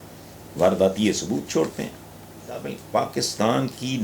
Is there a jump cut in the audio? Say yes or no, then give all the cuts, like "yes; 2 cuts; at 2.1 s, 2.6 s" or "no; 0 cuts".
yes; 1 cut; at 2.6 s